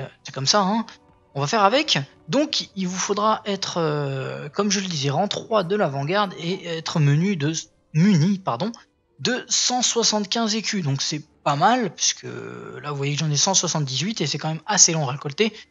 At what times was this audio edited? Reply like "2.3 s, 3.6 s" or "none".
none